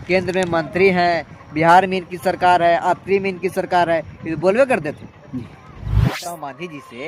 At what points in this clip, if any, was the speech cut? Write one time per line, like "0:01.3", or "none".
0:06.1

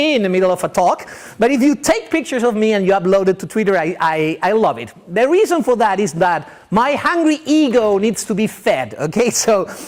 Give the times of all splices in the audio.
0:05.8

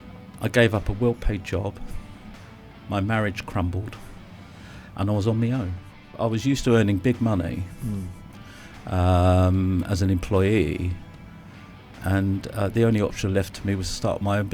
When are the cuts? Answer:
0:06.1

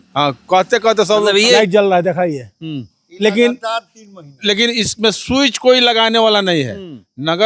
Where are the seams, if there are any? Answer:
0:01.6

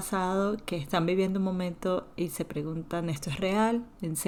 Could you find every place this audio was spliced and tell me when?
none

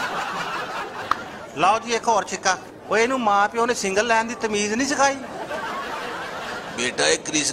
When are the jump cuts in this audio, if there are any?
0:00.9

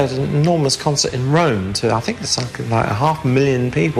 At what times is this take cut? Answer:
none

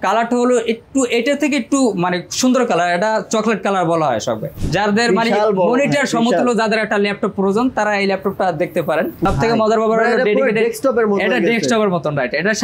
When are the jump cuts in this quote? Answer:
0:04.5
0:09.2

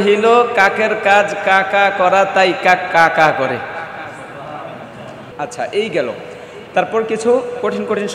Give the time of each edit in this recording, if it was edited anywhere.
0:05.2

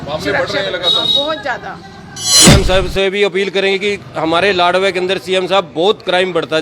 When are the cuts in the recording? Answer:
0:02.4

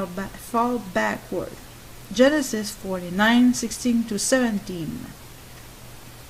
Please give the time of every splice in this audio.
none

